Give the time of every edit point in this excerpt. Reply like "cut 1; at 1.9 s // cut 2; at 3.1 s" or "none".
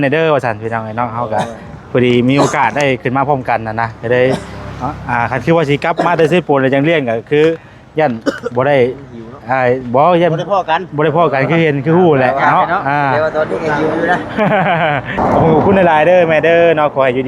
cut 1; at 15.2 s

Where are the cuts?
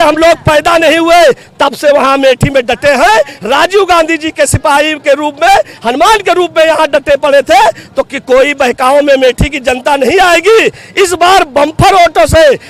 none

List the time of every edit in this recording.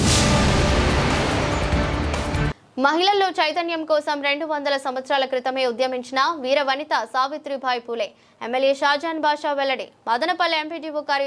cut 1; at 2.5 s

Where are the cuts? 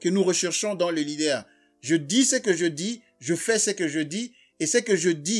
none

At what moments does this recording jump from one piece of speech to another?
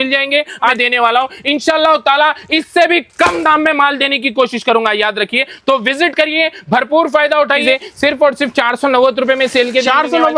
cut 1; at 0.8 s // cut 2; at 7.6 s

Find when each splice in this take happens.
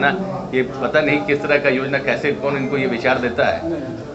none

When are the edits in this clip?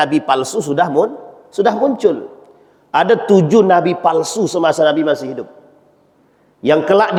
none

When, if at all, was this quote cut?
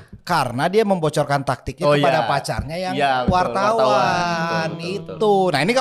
none

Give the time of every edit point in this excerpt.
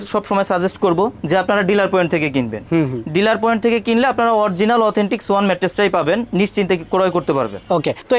none

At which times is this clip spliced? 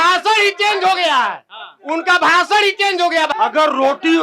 cut 1; at 3.3 s

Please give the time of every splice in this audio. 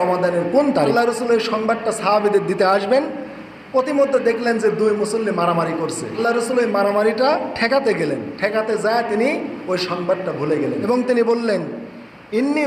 cut 1; at 0.9 s // cut 2; at 6.2 s // cut 3; at 10.9 s

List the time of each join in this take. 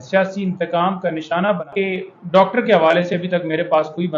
cut 1; at 1.7 s

